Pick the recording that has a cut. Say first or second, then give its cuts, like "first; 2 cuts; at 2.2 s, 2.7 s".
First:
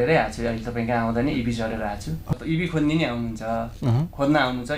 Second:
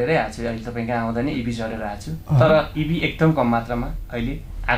first; 1 cut; at 2.3 s